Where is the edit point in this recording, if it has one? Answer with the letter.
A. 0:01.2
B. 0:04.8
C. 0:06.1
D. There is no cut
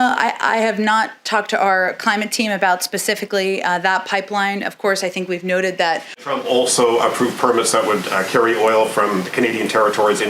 C